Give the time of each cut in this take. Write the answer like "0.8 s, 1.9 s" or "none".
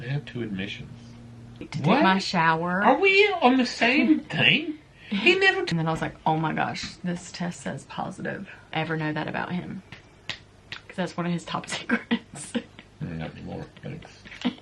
1.7 s, 5.7 s, 8.7 s